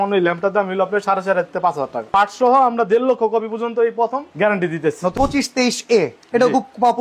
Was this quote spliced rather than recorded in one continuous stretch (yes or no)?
yes